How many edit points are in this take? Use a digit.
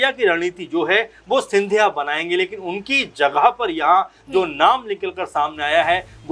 0